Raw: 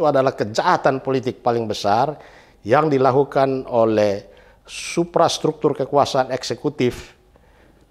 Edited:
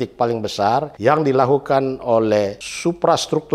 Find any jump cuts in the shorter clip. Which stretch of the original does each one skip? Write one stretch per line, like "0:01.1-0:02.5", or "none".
0:02.2-0:02.6
0:04.3-0:04.8